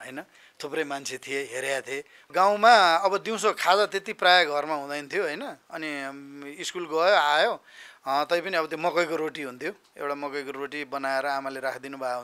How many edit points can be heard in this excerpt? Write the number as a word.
one